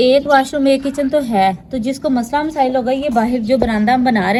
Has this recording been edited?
no; 0 cuts

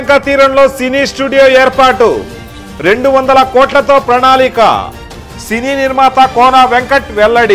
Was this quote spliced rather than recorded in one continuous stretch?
no; 0 cuts

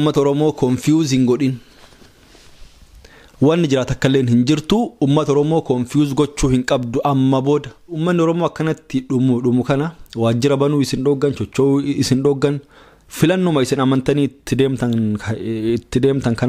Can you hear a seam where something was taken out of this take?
yes; 1 cut; at 7.9 s

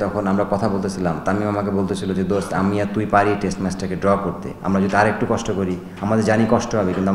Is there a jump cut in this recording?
no; 0 cuts

